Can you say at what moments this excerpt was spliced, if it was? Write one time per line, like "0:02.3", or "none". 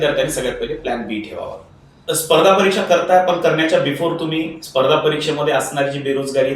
0:02.0